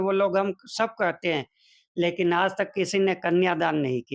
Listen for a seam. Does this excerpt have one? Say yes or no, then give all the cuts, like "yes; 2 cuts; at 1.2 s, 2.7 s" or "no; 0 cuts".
no; 0 cuts